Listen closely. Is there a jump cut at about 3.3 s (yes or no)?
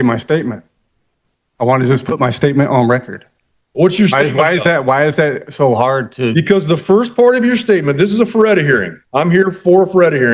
no